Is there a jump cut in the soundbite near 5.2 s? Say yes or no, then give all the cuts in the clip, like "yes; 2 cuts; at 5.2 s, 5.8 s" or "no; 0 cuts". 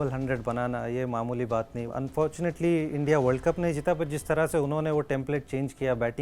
no; 1 cut; at 1.9 s